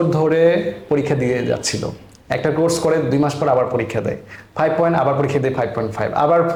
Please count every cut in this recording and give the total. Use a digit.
0